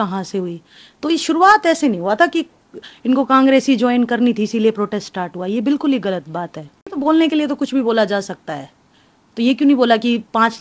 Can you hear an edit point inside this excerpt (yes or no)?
yes